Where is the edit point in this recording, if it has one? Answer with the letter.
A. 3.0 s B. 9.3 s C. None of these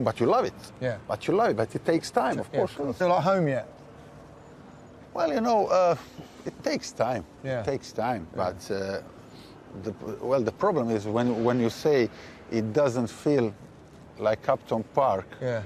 C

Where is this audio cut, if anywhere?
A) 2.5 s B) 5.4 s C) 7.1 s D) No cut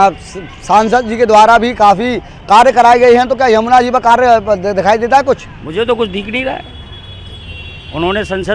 D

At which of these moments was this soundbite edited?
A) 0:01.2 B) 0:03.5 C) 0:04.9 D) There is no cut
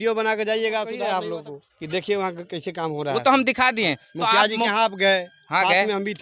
A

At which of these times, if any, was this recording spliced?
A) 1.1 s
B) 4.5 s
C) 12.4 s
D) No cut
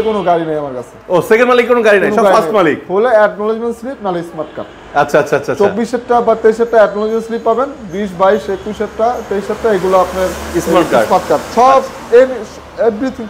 D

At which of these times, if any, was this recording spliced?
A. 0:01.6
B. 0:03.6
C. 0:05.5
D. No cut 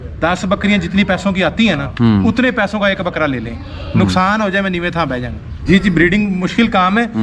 C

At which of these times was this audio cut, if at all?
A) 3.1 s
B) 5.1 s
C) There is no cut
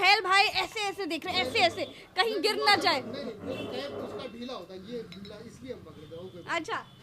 C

